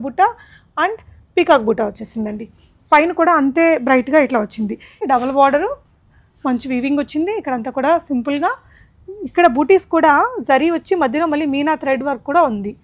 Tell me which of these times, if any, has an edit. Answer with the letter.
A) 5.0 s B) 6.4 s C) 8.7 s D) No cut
A